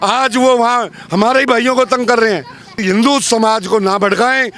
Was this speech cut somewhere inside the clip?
yes; 1 cut; at 2.8 s

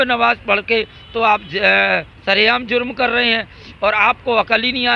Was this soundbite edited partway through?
no; 0 cuts

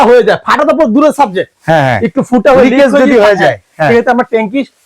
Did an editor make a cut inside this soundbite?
no; 0 cuts

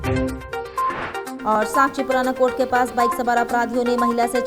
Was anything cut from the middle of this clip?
yes; 1 cut; at 1.2 s

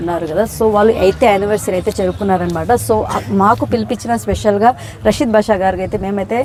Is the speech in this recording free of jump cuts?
yes; 0 cuts

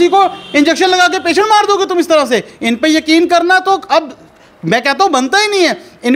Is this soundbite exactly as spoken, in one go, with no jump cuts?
yes; 0 cuts

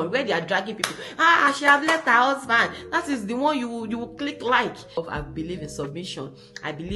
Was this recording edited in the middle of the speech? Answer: yes; 1 cut; at 5.0 s

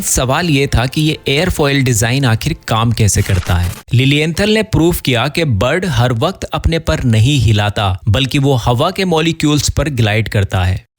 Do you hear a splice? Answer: yes; 1 cut; at 3.7 s

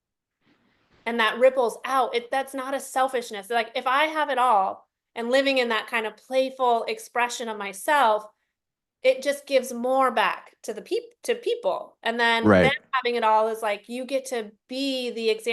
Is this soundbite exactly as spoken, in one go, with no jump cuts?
yes; 0 cuts

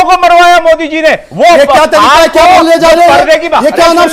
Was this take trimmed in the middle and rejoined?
yes; 1 cut; at 1.3 s

